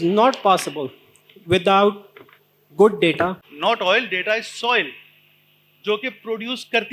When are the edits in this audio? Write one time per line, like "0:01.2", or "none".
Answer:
0:03.5